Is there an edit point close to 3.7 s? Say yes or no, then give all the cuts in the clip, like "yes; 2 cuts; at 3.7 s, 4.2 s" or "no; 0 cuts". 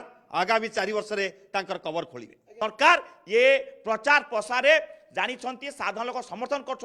no; 1 cut; at 2.4 s